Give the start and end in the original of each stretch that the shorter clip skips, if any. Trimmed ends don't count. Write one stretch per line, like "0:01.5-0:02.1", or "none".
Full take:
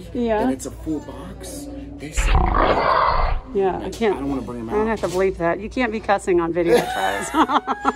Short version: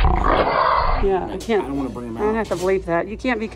0:03.3-0:03.5